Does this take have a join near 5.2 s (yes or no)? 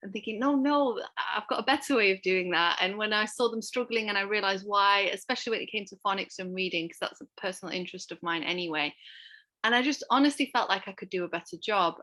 no